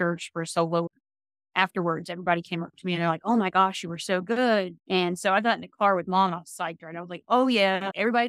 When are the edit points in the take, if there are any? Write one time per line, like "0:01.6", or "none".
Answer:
0:00.9
0:04.8